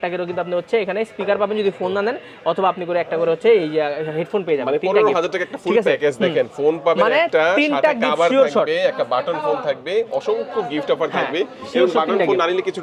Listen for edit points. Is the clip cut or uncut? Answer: uncut